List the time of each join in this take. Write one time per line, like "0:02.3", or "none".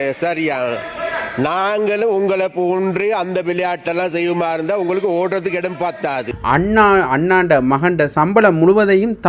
0:06.3

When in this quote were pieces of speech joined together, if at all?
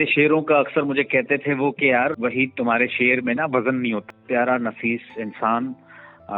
0:02.2
0:04.0

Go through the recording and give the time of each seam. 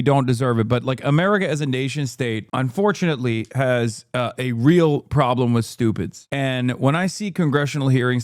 0:06.2

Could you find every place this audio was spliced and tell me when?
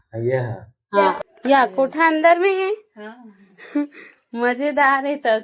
0:01.2

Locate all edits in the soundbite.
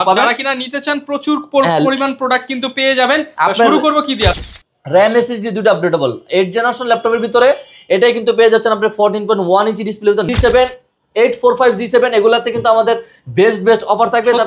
0:04.4
0:10.3

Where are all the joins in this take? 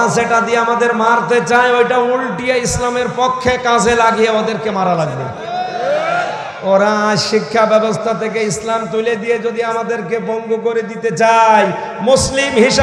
none

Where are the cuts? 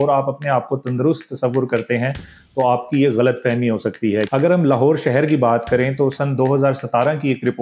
0:04.3

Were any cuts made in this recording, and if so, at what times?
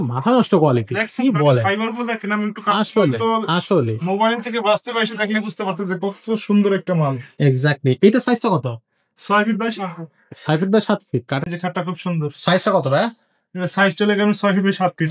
0:11.4

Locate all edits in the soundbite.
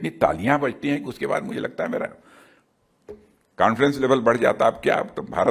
none

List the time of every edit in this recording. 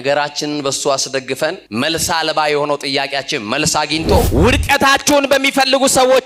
0:01.6
0:04.3

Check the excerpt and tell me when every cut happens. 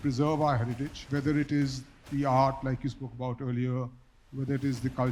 0:01.0

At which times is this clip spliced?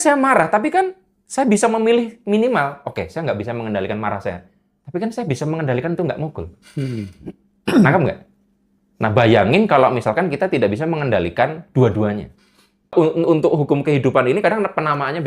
0:12.9

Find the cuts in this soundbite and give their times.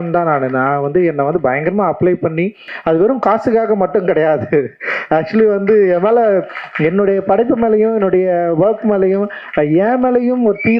0:02.7

